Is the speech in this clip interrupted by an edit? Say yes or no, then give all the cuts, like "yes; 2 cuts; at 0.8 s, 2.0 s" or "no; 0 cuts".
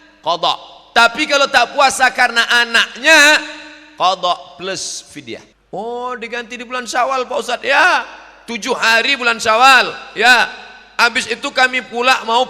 yes; 1 cut; at 5.5 s